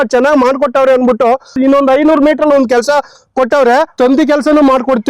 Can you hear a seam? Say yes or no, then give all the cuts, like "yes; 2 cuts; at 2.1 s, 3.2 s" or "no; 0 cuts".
yes; 2 cuts; at 1.6 s, 3.9 s